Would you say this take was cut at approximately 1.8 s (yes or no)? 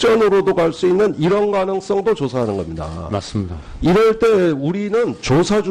no